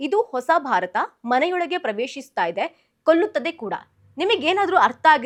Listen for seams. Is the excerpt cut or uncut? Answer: uncut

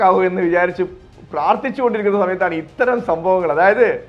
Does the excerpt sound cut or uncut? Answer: uncut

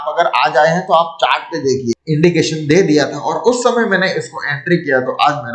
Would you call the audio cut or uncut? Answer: cut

